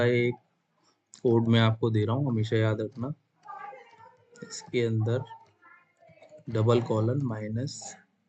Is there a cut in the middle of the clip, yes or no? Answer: no